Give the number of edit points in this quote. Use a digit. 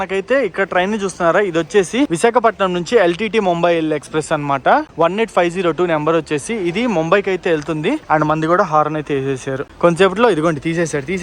0